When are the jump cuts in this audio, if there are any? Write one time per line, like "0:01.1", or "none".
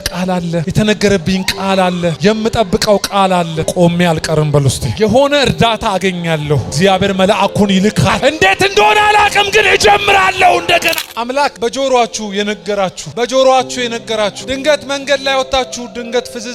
0:03.6
0:08.1
0:11.0

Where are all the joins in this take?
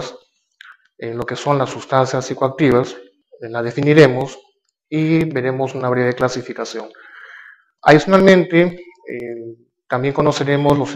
0:03.1

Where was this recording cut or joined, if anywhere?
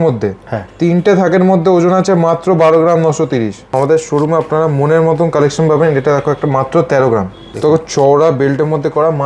0:03.7
0:07.4

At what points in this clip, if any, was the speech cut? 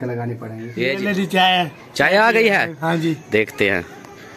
0:01.0

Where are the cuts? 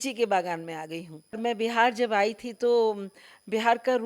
0:01.4

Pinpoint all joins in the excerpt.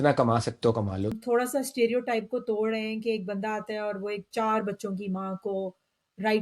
0:01.1

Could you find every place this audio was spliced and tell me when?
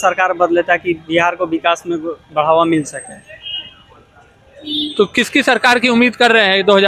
none

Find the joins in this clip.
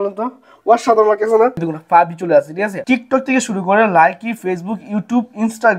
0:01.6
0:02.8

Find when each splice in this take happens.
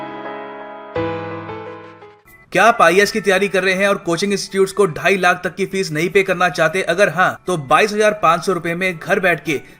0:02.2

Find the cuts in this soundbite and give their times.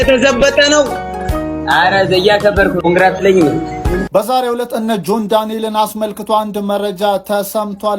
0:04.0

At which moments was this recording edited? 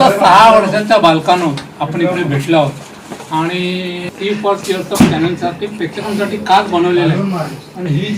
0:04.1

